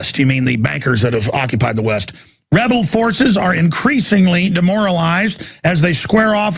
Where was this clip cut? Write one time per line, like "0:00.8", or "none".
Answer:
0:04.4